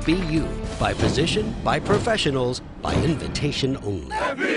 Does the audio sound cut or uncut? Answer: uncut